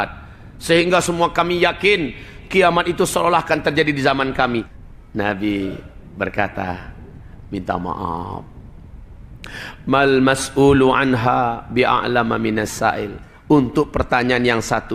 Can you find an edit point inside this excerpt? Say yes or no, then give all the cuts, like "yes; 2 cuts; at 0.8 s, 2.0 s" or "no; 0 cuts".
yes; 1 cut; at 4.7 s